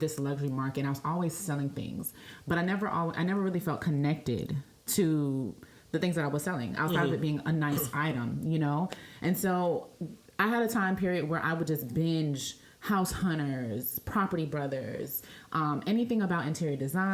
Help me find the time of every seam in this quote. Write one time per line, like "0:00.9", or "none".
none